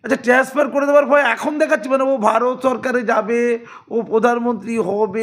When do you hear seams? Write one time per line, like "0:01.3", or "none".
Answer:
none